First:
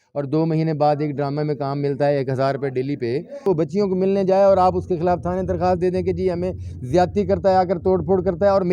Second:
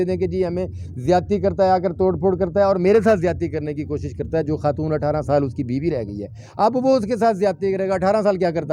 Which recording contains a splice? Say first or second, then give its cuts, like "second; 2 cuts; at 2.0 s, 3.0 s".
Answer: first; 1 cut; at 3.4 s